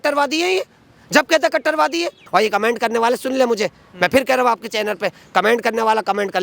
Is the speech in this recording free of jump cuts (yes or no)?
no